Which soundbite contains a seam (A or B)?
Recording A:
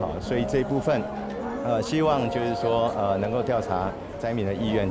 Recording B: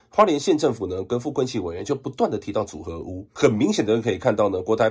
B